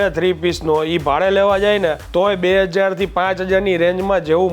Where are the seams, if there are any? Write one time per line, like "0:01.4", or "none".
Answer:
0:02.0